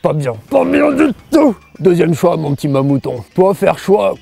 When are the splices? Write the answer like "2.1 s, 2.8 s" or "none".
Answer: 1.7 s